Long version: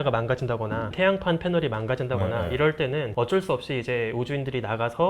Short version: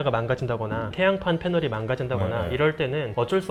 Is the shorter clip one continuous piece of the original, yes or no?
yes